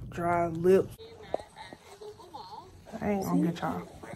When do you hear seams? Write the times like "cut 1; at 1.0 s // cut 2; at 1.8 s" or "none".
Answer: cut 1; at 1.2 s